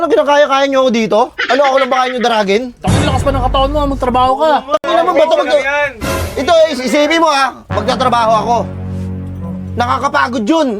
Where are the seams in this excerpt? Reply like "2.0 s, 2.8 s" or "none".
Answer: none